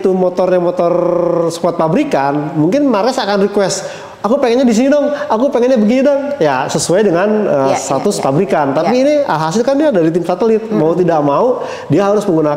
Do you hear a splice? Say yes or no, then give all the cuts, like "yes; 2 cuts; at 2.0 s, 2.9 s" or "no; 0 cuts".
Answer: no; 0 cuts